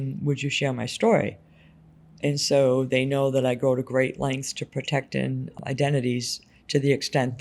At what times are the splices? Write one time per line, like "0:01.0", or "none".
0:05.6